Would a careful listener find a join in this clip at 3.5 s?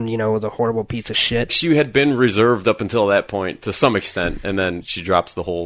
no; 2 cuts; at 1.5 s, 4.8 s

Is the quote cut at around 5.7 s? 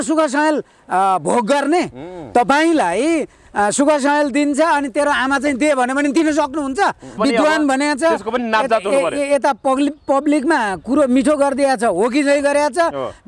no; 1 cut; at 7.2 s

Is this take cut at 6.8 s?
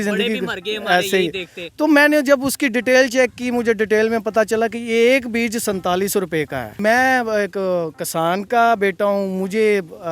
yes; 1 cut; at 6.8 s

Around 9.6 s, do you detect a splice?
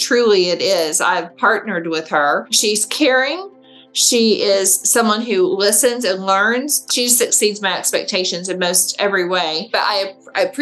yes; 3 cuts; at 2.5 s, 6.8 s, 9.6 s

